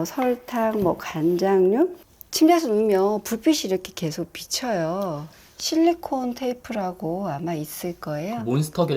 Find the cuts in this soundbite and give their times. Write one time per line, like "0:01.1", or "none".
0:02.0
0:05.3

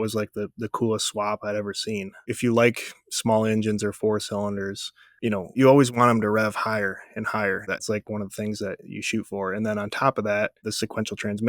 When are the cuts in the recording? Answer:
0:02.1
0:05.6
0:07.9
0:10.6

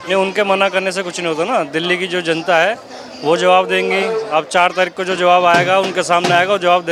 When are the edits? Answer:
none

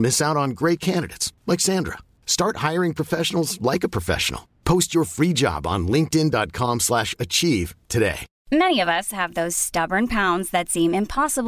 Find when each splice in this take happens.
0:08.3

